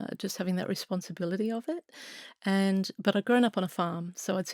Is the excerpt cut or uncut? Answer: uncut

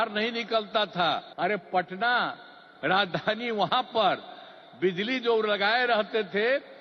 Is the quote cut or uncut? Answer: cut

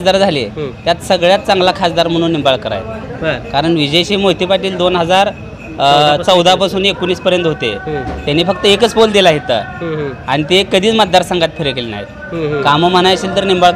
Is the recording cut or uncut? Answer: uncut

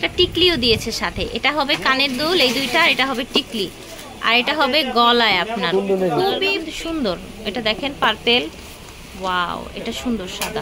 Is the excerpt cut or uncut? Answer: cut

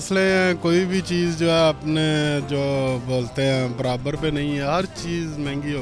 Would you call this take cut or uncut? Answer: uncut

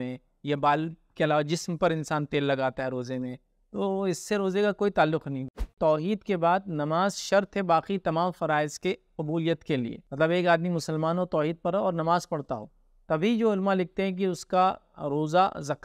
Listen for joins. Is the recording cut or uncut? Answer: cut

